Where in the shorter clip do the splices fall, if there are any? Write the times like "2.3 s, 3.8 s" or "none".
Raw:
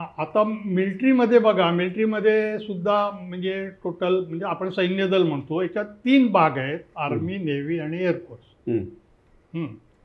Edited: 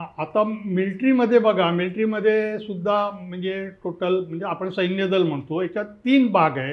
none